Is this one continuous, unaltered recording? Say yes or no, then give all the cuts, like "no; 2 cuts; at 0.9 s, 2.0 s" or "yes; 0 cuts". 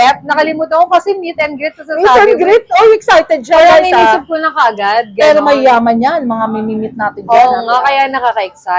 yes; 0 cuts